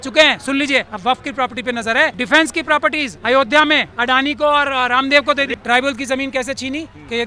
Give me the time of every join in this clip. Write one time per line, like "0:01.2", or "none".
0:00.9
0:02.2
0:03.1
0:03.9
0:05.5